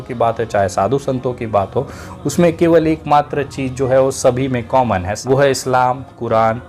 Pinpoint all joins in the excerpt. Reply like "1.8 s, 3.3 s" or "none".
5.1 s